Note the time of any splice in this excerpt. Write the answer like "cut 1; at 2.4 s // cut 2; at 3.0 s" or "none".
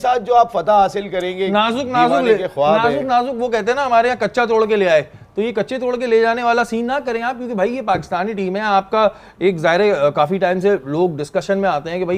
none